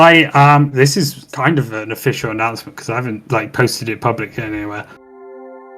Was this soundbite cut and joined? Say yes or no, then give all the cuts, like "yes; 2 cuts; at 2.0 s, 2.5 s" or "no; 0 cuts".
yes; 1 cut; at 4.9 s